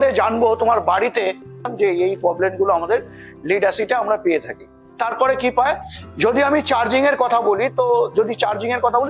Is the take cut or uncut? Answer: cut